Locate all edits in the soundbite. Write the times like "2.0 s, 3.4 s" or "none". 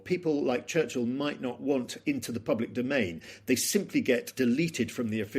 4.3 s

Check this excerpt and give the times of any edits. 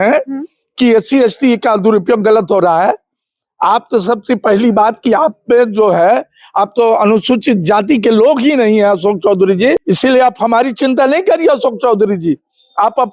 9.8 s

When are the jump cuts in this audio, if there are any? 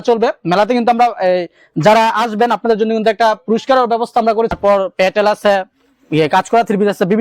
4.6 s

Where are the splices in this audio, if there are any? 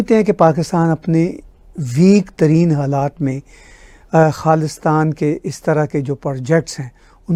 none

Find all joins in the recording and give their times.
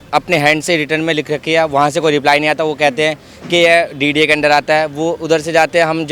none

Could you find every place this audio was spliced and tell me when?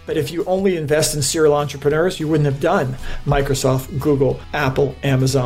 4.5 s

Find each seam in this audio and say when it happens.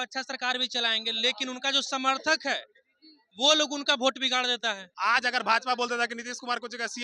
4.9 s

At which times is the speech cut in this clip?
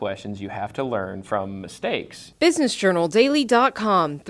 2.2 s

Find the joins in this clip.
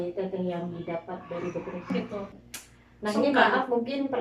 1.9 s

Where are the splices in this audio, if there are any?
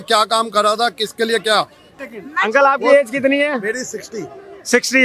2.0 s

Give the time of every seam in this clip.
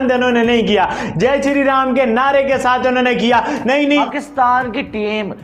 4.0 s

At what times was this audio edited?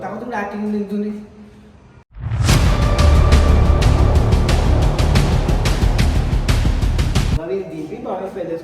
7.4 s

